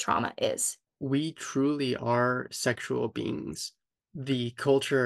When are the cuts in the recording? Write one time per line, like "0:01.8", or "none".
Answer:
0:00.9